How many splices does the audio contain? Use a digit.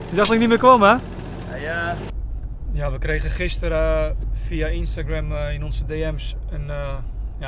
1